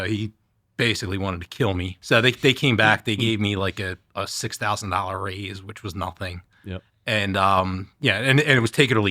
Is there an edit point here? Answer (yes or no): yes